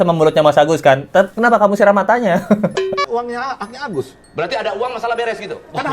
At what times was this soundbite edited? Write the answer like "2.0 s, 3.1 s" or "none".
3.1 s